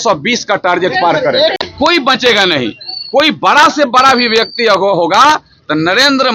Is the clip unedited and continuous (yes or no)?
yes